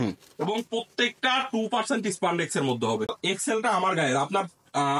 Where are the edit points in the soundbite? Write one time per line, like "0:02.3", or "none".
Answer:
0:03.2